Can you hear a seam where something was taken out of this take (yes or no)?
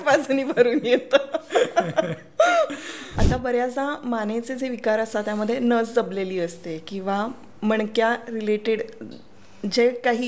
yes